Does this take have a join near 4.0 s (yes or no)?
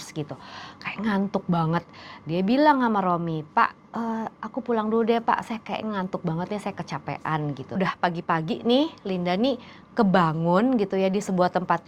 no